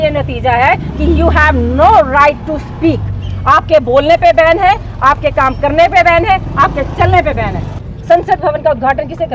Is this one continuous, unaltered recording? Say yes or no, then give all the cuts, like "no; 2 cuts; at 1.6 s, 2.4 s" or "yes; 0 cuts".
no; 1 cut; at 7.8 s